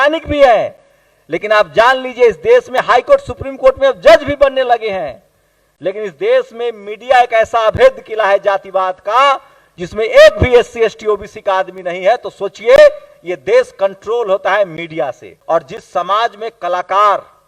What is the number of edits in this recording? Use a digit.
1